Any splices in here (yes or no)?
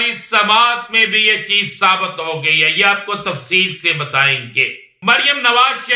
yes